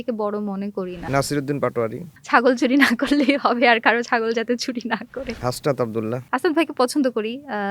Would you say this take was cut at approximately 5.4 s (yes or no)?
yes